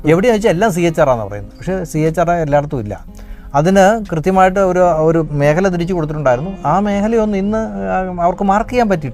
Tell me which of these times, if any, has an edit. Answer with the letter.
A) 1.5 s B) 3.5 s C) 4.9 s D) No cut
D